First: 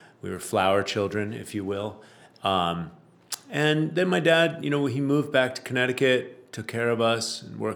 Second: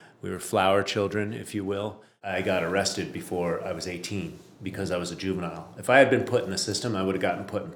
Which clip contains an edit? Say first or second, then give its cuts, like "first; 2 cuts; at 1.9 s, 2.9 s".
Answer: second; 1 cut; at 2.3 s